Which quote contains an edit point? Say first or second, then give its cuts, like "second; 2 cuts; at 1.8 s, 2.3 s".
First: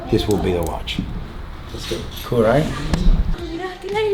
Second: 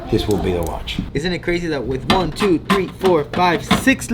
second; 1 cut; at 1.1 s